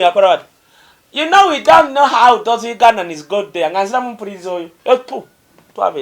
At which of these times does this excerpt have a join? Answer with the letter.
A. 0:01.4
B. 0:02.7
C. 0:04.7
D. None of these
C